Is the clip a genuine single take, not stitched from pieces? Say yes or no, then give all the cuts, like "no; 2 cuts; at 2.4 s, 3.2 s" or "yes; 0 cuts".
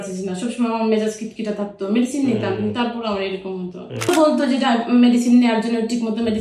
no; 1 cut; at 4.1 s